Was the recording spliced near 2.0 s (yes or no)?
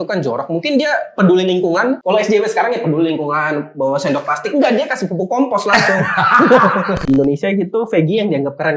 yes